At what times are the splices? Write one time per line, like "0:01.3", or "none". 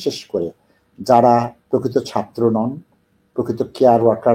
0:01.6